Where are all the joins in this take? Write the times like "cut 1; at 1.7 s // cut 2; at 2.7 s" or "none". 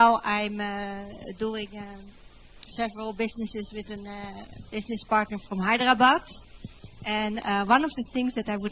cut 1; at 3.7 s

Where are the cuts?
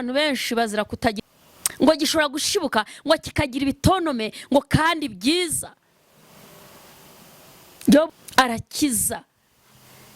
cut 1; at 1.2 s // cut 2; at 8.1 s

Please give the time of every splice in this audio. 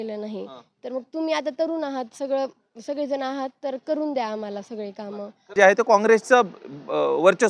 cut 1; at 5.5 s

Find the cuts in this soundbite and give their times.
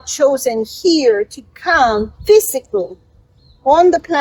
none

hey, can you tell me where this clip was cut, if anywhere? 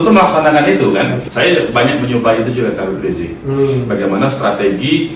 cut 1; at 1.2 s

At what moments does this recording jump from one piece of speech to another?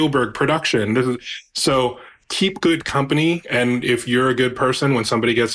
cut 1; at 2.1 s

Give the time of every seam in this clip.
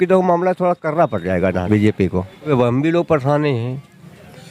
cut 1; at 1.7 s // cut 2; at 2.5 s

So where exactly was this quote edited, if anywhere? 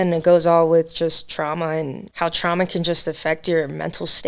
cut 1; at 2.0 s

